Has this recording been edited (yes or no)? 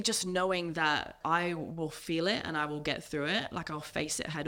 yes